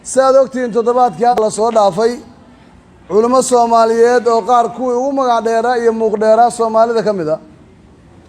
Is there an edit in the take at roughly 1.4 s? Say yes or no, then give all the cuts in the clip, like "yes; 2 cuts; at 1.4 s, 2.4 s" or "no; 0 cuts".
yes; 1 cut; at 1.4 s